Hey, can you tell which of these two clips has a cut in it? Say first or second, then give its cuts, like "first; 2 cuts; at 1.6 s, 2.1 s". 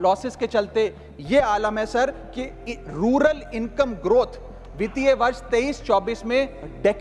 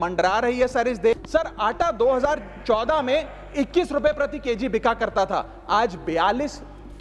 second; 1 cut; at 1.2 s